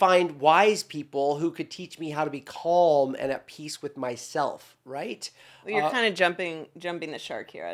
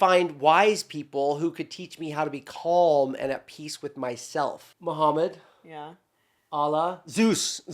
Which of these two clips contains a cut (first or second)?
second